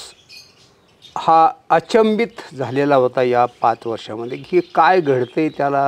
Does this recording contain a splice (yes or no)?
no